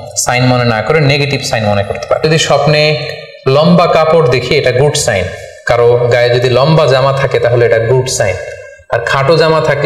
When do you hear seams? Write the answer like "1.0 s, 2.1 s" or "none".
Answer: 2.2 s